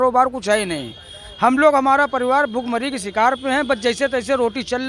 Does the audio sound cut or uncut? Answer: uncut